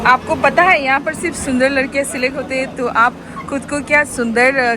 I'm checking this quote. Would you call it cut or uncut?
uncut